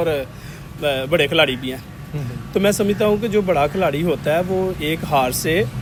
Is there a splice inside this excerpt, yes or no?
no